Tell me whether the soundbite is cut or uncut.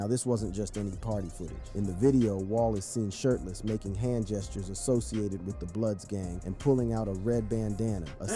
uncut